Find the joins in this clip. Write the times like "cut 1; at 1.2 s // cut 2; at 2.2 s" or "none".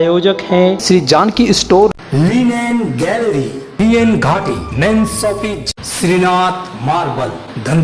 none